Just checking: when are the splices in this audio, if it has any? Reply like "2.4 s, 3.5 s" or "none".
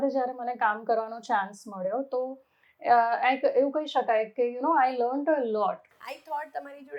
5.9 s